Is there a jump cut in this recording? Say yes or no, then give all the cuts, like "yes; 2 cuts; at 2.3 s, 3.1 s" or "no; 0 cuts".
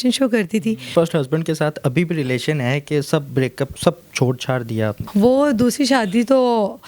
yes; 2 cuts; at 0.9 s, 5.0 s